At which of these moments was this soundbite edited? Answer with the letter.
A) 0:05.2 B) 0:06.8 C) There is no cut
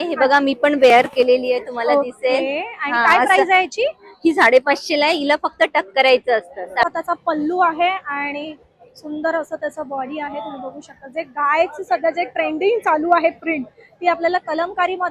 B